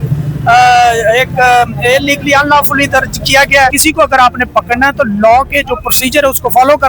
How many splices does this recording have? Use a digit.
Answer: 1